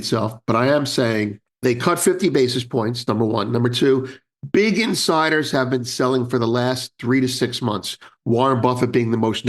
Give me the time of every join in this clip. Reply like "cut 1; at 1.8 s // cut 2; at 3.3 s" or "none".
cut 1; at 1.4 s